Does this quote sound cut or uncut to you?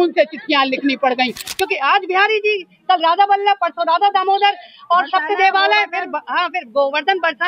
cut